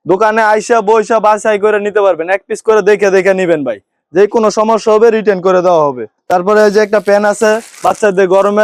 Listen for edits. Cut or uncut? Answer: uncut